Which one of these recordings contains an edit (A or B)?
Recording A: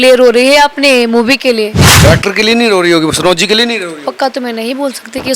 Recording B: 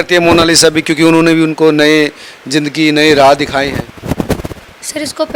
A